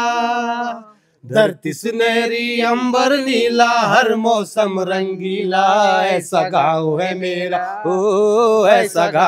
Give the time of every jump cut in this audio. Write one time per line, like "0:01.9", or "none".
none